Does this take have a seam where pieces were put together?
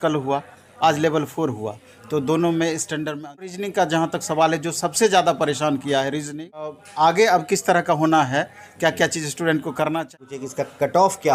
yes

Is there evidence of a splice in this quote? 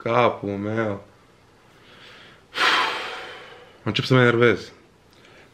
no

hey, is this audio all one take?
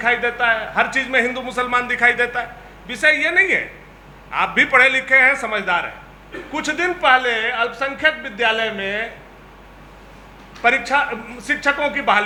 yes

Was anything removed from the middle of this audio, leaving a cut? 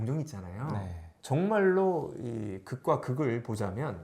yes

